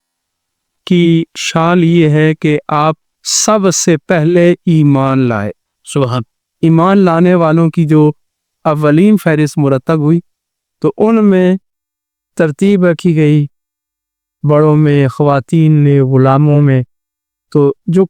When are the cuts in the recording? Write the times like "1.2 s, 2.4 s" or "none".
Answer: none